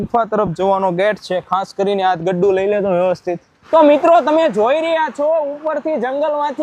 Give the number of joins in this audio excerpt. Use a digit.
1